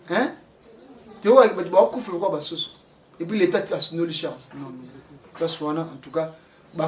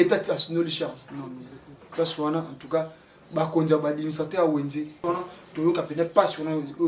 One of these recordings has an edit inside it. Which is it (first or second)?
second